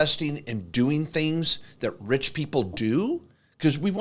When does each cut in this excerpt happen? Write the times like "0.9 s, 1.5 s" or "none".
none

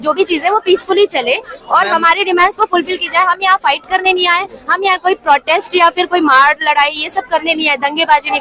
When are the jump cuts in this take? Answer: none

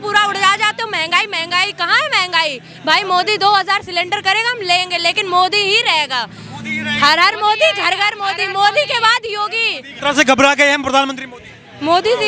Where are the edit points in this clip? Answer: 10.0 s

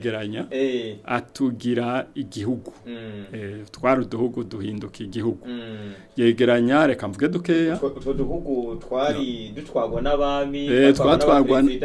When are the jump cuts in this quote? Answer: none

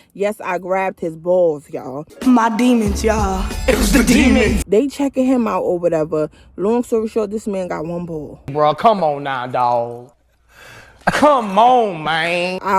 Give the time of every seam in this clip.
4.6 s

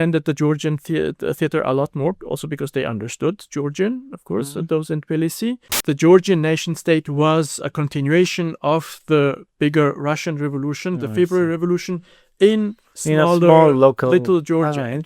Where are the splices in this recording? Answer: 5.7 s

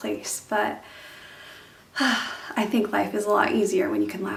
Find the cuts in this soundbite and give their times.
none

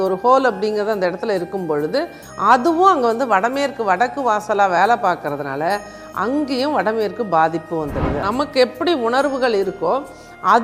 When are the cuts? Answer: 8.2 s

